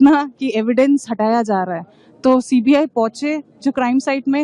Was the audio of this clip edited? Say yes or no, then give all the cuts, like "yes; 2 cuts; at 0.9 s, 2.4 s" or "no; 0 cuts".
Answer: yes; 1 cut; at 1.1 s